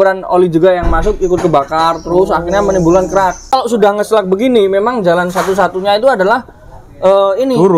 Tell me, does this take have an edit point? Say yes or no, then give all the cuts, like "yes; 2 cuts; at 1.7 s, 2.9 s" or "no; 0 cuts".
yes; 1 cut; at 3.5 s